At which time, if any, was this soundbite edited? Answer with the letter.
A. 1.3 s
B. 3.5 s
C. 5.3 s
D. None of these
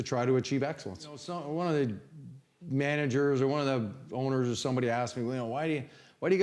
A